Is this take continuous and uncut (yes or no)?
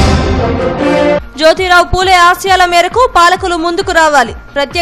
no